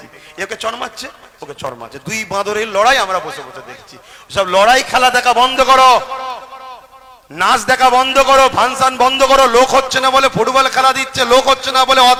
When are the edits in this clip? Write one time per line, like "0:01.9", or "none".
none